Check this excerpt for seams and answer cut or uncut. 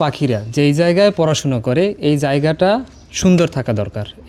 uncut